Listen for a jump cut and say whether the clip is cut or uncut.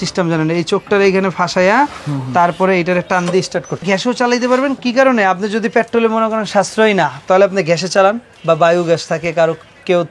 cut